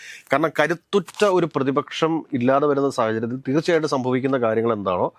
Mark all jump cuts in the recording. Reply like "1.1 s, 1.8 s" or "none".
none